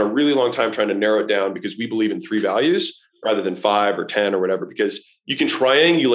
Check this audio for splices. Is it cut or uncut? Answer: uncut